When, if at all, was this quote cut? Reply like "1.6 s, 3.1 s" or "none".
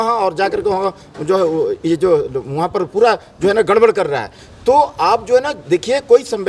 none